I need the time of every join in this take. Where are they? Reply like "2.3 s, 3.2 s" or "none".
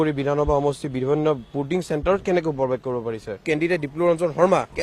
3.4 s